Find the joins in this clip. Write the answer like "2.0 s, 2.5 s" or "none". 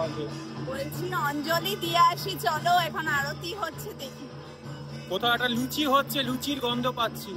none